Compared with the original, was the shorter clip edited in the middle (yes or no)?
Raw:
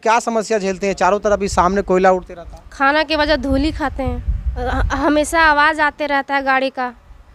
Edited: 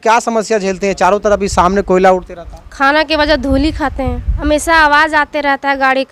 yes